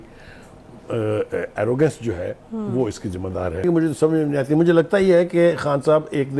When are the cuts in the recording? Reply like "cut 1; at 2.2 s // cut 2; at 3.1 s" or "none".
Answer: cut 1; at 3.6 s